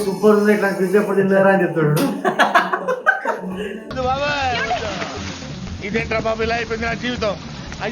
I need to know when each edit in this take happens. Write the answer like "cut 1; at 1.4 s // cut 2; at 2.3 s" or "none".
cut 1; at 3.8 s

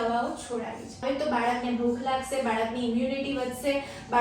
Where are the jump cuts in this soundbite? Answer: cut 1; at 1.0 s

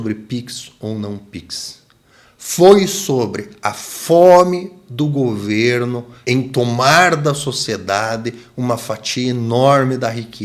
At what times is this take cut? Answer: none

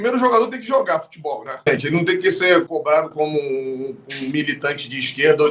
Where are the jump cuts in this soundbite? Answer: cut 1; at 1.6 s

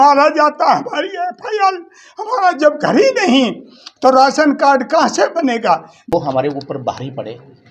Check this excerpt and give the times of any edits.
cut 1; at 6.1 s

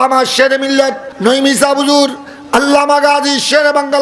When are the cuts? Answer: cut 1; at 1.1 s

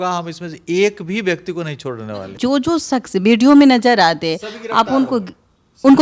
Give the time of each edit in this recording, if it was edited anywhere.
cut 1; at 2.3 s

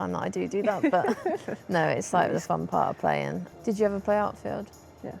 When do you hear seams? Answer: cut 1; at 3.7 s

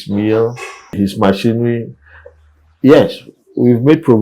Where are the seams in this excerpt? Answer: cut 1; at 0.9 s

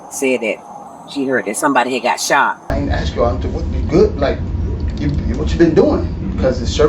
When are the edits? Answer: cut 1; at 2.7 s

